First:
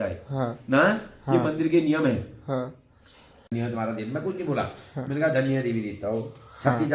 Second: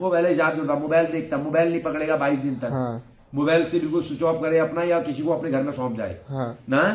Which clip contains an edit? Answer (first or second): first